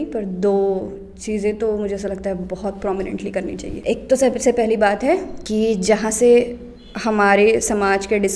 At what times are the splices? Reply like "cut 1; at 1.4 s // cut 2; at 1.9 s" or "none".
cut 1; at 3.7 s // cut 2; at 5.4 s